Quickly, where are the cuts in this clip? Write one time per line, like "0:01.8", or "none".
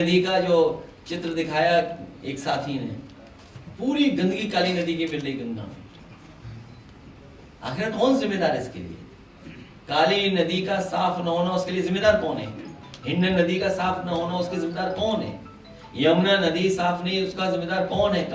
none